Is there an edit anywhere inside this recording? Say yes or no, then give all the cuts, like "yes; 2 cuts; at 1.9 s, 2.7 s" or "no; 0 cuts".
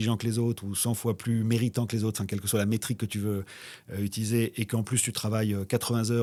no; 0 cuts